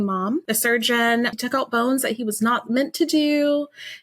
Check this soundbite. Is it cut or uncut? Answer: cut